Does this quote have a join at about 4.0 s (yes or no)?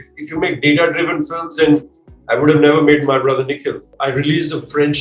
yes